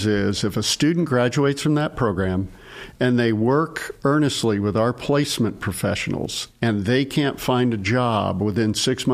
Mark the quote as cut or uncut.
uncut